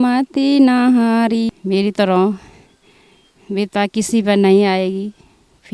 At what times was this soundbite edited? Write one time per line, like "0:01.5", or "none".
0:01.5